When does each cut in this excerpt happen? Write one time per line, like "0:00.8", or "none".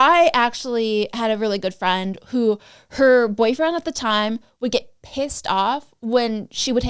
none